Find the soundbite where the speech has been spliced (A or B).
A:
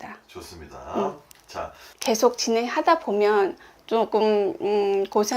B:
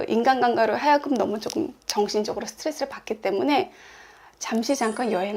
A